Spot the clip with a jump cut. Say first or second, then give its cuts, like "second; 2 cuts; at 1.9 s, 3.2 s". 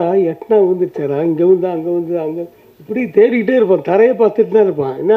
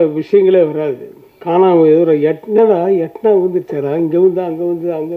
second; 1 cut; at 1.4 s